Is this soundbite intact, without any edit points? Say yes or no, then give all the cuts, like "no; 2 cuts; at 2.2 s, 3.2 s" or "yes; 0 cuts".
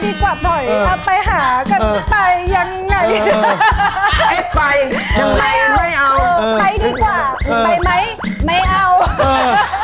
yes; 0 cuts